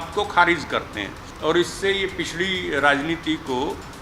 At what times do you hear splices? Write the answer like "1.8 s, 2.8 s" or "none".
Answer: 1.3 s

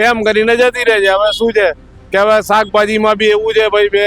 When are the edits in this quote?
none

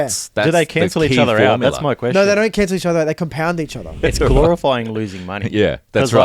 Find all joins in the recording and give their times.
4.0 s

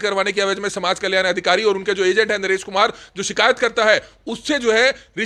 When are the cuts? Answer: none

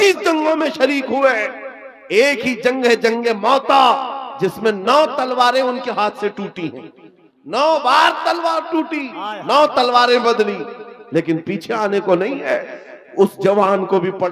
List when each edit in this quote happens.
none

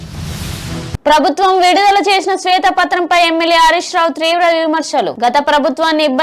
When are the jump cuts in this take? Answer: 1.0 s

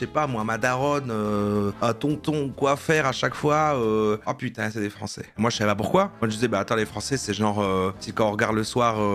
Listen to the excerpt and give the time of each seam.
none

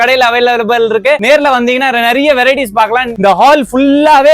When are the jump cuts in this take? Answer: 3.1 s

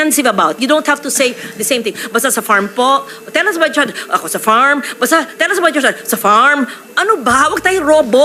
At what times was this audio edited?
none

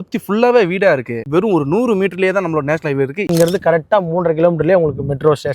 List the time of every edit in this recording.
1.2 s, 3.3 s

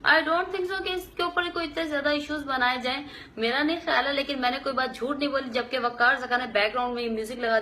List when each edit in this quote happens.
3.1 s

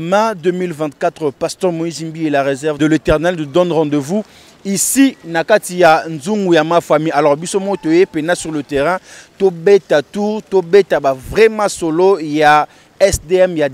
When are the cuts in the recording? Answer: 2.8 s

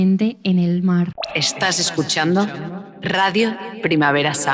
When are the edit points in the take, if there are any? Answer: 1.2 s

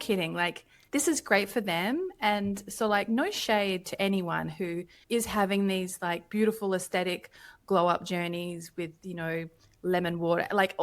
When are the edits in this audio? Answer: none

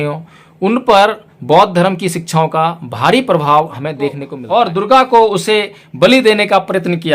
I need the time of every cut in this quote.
4.4 s

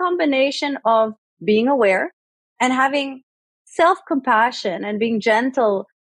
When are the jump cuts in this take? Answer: none

